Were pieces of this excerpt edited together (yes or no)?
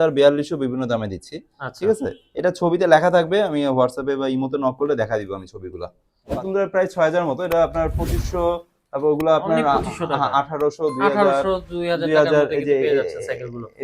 yes